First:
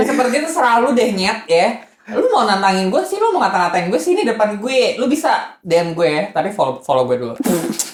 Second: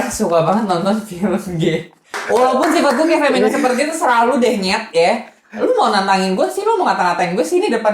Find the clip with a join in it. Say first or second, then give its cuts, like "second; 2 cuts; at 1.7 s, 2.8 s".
second; 1 cut; at 2.2 s